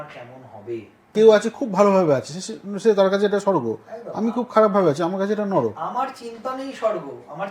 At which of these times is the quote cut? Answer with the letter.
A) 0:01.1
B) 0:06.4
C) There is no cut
A